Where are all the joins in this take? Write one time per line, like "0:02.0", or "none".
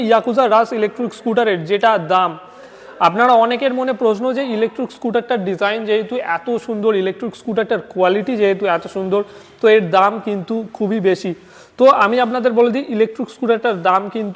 none